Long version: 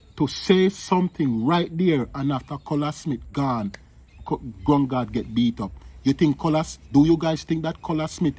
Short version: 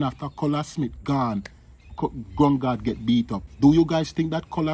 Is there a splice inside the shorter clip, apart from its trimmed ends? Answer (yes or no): yes